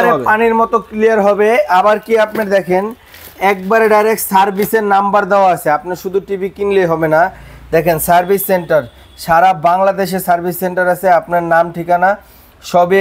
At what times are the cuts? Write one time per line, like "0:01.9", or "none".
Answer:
none